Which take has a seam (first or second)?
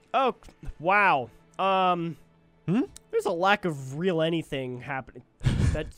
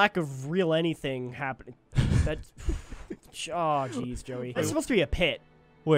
second